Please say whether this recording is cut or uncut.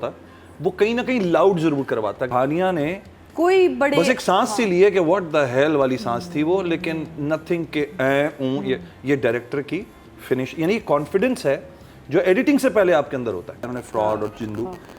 cut